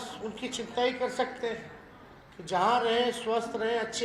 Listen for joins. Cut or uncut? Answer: uncut